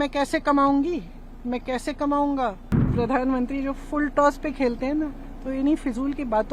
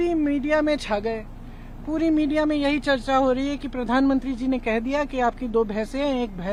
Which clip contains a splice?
first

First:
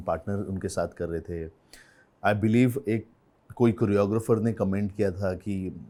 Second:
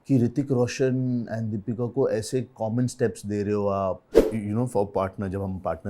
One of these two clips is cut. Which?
second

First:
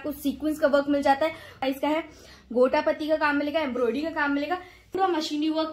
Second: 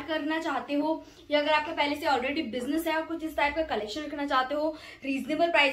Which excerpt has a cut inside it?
first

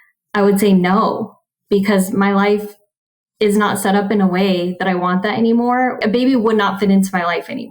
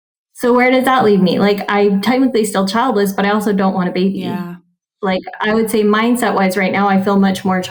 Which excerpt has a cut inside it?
first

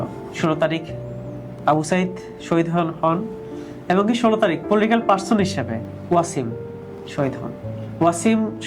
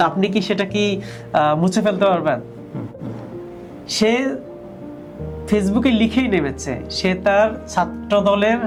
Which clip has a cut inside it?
first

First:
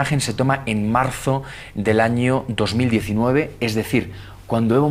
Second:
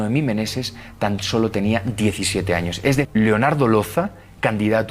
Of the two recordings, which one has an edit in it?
second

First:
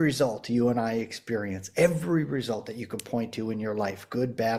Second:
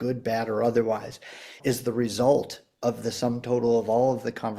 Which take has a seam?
second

